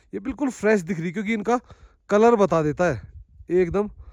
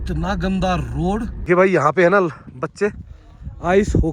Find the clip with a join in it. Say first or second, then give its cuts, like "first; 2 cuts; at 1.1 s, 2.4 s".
second; 1 cut; at 1.3 s